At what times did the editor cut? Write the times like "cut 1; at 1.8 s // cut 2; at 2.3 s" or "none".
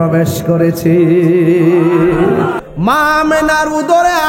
cut 1; at 2.6 s